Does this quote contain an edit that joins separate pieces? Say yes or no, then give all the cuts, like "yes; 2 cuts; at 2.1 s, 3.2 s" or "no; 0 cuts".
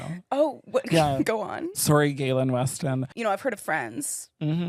no; 0 cuts